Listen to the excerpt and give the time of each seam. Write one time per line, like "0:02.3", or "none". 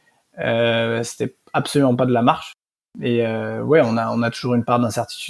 0:02.6